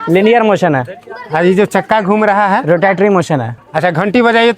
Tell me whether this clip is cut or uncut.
cut